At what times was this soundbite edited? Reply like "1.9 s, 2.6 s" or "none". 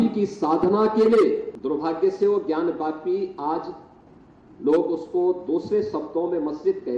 1.5 s